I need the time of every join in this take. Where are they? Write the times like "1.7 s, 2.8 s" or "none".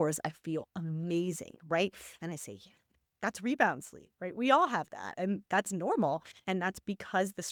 none